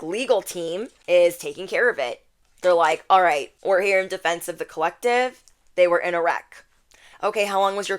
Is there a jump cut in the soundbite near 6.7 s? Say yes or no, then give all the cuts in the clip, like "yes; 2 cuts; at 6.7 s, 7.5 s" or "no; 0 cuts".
no; 2 cuts; at 0.9 s, 3.5 s